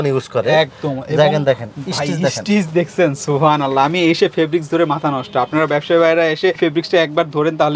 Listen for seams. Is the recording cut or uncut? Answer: uncut